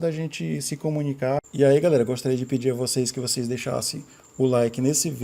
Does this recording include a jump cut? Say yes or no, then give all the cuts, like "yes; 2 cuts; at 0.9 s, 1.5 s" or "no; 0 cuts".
yes; 1 cut; at 1.4 s